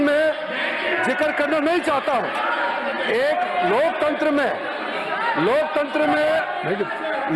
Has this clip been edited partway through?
no; 0 cuts

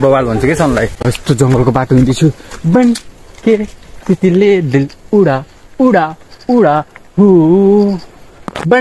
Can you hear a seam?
yes; 1 cut; at 1.0 s

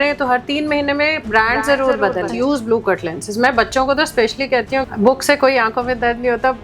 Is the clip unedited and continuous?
no; 2 cuts; at 2.3 s, 4.9 s

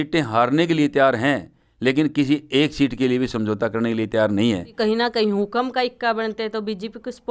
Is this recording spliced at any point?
yes; 1 cut; at 4.7 s

